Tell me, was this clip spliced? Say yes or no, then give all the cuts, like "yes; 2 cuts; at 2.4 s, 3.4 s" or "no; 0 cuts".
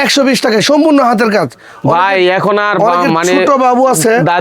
no; 0 cuts